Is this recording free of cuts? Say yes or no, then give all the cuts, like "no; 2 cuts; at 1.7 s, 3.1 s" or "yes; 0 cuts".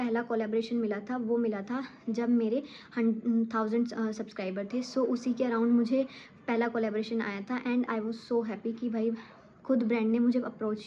yes; 0 cuts